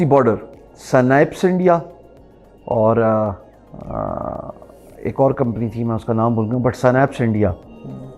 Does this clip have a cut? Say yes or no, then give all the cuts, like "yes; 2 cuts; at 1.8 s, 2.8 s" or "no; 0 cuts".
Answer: no; 0 cuts